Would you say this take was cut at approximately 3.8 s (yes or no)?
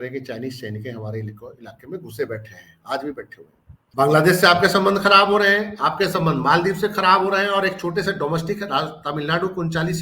yes